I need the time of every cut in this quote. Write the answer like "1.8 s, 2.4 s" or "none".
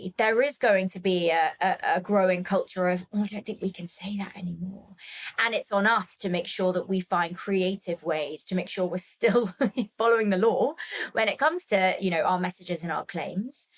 none